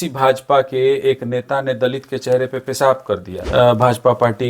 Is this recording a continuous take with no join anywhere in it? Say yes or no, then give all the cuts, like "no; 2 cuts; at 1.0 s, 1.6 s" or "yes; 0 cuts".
no; 1 cut; at 3.3 s